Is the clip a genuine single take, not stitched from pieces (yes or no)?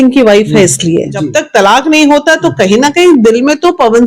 no